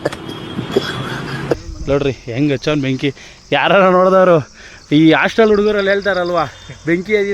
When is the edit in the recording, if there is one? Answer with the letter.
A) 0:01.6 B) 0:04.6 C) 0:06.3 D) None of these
A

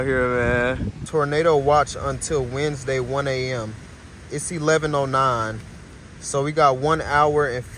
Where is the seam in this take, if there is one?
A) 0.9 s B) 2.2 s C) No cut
A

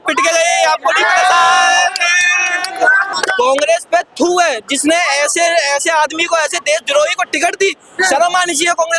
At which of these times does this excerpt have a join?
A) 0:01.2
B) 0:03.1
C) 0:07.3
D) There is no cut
B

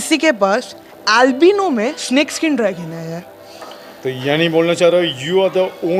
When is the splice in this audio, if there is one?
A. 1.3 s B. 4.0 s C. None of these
C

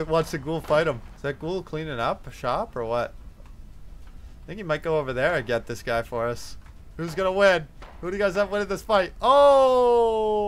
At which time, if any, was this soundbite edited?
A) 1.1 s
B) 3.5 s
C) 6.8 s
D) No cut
A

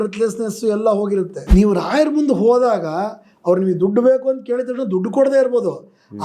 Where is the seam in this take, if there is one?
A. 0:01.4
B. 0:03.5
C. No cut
A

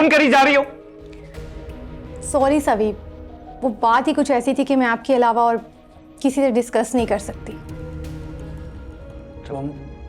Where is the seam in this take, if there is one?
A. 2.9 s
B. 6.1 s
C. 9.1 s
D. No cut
C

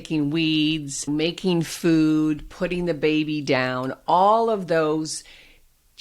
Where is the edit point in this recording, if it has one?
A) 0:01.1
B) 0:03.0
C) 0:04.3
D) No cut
A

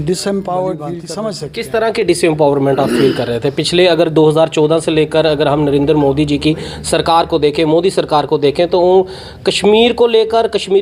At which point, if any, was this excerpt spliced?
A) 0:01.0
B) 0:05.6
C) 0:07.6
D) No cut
A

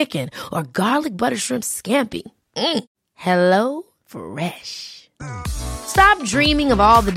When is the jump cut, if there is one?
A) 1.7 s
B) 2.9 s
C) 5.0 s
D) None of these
D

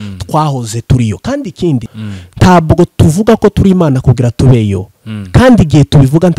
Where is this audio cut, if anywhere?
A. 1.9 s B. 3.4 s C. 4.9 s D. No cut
A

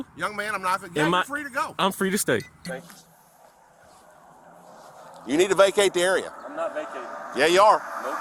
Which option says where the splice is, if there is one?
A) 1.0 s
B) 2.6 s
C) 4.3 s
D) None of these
D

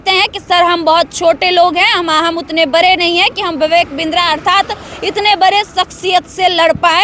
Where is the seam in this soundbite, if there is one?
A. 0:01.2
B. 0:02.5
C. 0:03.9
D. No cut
D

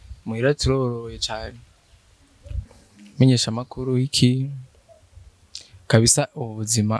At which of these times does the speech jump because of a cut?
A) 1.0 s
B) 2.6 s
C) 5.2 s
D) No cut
B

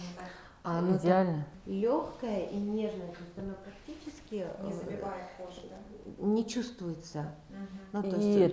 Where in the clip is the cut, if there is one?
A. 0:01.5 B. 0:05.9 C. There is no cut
A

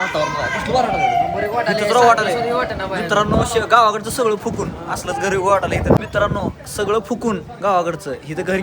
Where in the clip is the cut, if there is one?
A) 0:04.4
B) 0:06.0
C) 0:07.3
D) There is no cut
B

